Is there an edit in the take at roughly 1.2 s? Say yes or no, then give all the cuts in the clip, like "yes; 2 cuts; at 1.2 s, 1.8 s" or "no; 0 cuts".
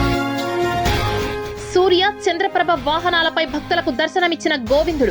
yes; 1 cut; at 1.2 s